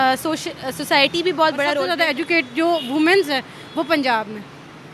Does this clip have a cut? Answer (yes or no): yes